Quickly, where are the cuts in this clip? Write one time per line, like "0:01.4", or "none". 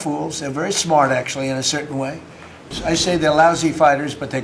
0:02.7